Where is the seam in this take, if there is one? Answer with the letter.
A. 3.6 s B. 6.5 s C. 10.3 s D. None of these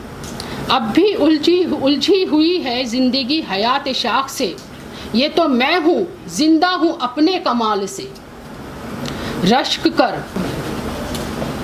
C